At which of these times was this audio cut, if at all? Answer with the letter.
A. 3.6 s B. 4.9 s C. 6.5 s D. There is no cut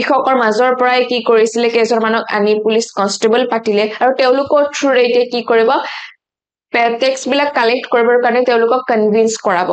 D